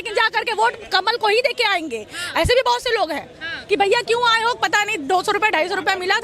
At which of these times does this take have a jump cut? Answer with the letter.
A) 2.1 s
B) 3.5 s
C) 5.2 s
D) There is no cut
B